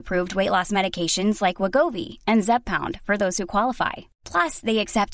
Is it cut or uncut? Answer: uncut